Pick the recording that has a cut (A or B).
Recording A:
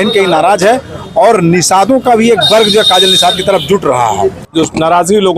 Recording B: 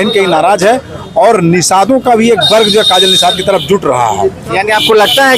A